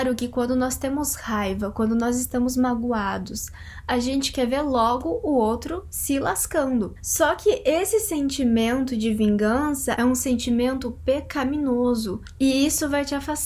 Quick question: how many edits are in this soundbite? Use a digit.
3